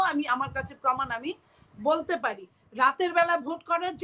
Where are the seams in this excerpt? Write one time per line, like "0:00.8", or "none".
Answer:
0:02.6